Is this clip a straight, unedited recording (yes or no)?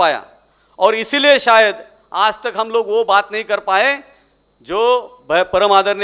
yes